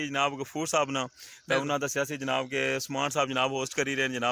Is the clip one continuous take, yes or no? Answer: yes